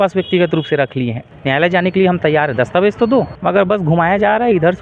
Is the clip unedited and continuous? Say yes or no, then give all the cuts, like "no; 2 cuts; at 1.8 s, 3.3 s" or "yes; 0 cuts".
no; 2 cuts; at 1.2 s, 3.3 s